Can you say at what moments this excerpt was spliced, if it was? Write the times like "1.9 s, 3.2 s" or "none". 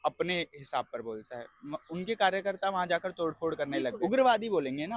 4.0 s